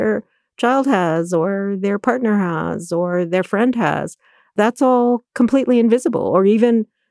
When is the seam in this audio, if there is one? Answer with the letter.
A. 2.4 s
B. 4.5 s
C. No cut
B